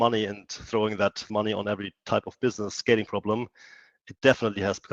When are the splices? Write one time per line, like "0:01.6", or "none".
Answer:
0:01.3

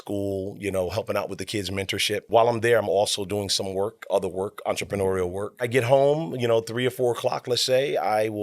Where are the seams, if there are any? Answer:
0:02.2
0:05.7

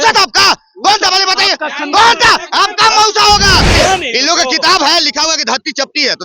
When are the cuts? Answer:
0:03.7

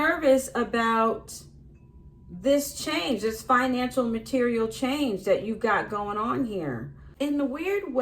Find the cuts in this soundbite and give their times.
0:07.0

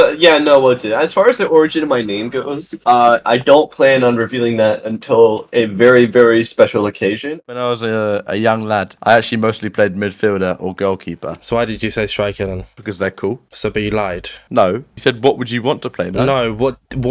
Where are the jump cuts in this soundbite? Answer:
0:07.3

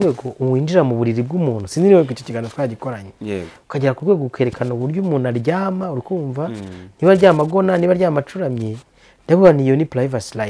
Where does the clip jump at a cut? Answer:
none

